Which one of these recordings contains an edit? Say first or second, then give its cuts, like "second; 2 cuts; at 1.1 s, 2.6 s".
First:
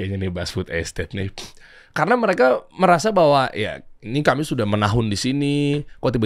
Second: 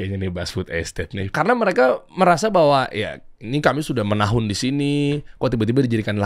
second; 1 cut; at 1.3 s